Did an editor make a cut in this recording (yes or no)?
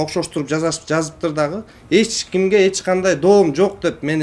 no